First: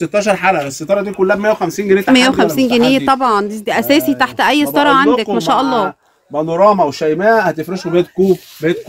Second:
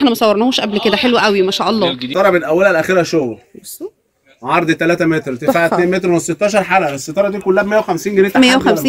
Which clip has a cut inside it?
second; 1 cut; at 2.0 s

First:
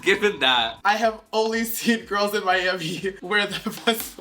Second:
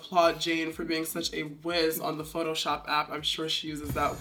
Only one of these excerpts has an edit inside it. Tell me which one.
first; 2 cuts; at 0.8 s, 3.2 s

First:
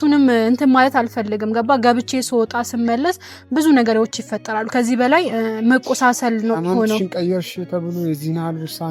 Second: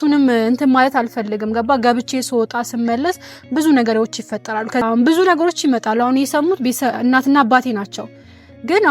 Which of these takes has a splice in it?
second; 1 cut; at 4.8 s

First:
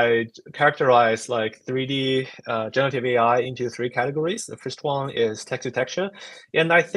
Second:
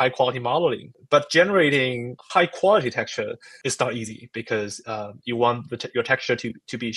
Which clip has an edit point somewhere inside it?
second; 3 cuts; at 0.9 s, 2.1 s, 3.5 s

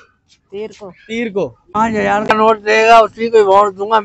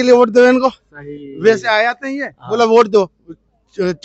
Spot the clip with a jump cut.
first; 1 cut; at 1.6 s

